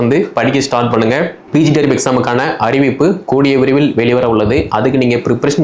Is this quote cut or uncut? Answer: uncut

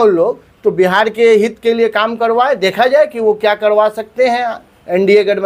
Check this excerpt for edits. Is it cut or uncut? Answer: uncut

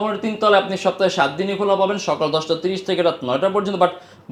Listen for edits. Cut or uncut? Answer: uncut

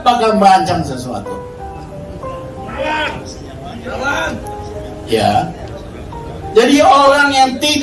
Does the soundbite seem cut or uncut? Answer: uncut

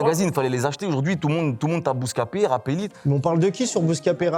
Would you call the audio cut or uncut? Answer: uncut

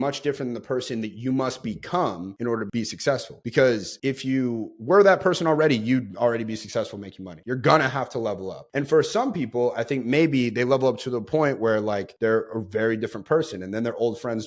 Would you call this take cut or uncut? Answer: uncut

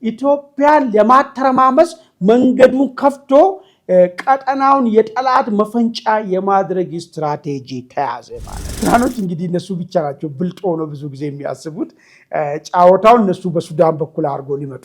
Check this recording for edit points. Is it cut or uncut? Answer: cut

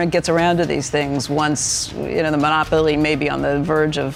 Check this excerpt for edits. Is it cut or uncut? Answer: uncut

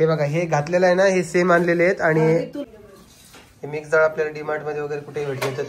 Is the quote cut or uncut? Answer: cut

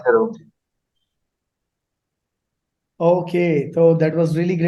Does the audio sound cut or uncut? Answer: uncut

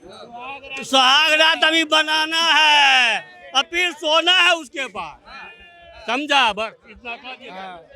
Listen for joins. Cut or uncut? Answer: uncut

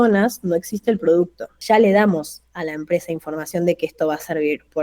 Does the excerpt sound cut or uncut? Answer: cut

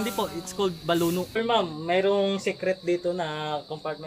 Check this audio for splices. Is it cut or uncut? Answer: cut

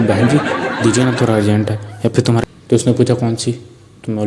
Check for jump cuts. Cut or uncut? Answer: cut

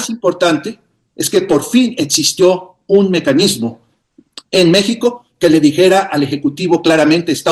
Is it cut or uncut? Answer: uncut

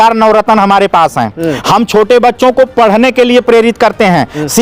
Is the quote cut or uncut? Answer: uncut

